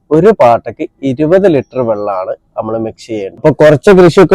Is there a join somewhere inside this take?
yes; 1 cut; at 3.2 s

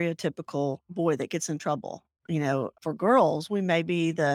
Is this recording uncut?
no; 1 cut; at 2.8 s

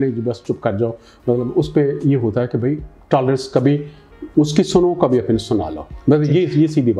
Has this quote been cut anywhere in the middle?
no; 0 cuts

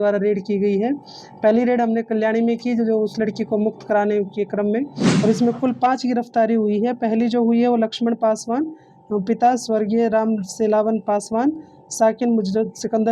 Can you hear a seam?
yes; 1 cut; at 5.0 s

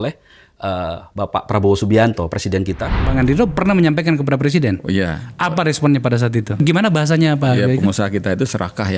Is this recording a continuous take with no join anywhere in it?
no; 2 cuts; at 3.1 s, 6.6 s

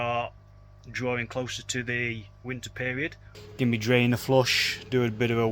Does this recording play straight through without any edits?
no; 1 cut; at 3.3 s

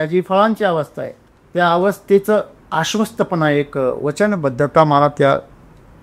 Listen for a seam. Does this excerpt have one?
yes; 1 cut; at 2.6 s

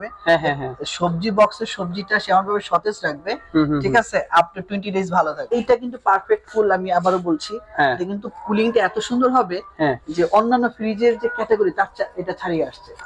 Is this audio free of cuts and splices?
no; 1 cut; at 5.5 s

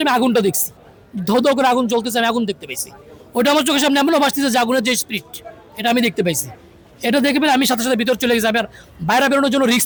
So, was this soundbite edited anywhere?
no; 0 cuts

